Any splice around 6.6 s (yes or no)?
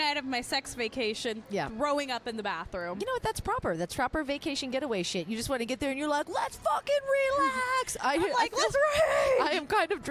no